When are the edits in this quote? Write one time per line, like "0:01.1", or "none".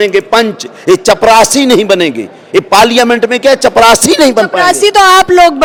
none